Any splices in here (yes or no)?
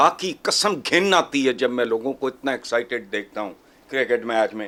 no